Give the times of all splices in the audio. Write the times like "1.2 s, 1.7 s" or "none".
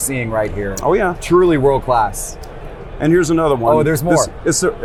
none

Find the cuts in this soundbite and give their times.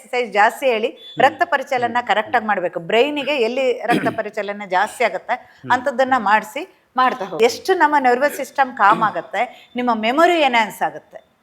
7.4 s

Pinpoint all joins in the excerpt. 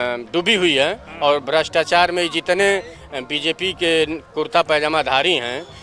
none

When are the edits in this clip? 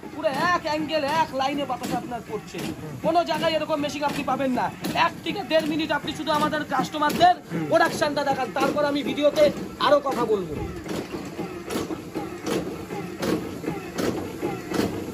none

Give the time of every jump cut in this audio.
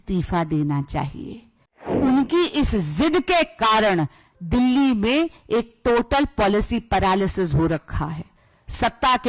1.9 s

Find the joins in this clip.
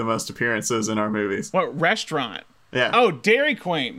1.5 s

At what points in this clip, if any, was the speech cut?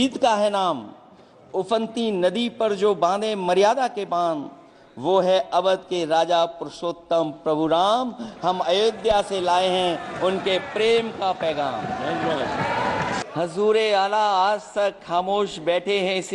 13.2 s

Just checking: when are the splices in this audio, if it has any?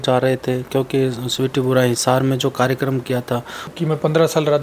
3.7 s

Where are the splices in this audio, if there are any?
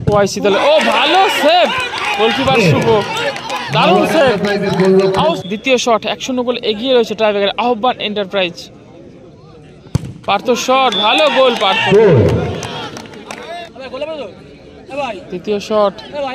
5.4 s, 13.6 s

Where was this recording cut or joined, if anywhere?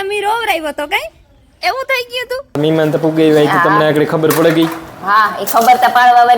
2.6 s

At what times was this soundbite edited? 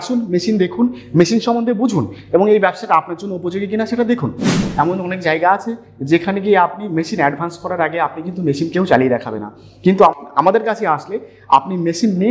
4.6 s, 10.2 s

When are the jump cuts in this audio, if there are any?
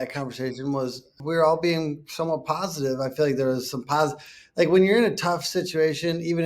1.1 s

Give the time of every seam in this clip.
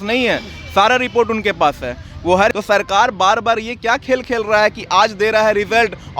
2.5 s

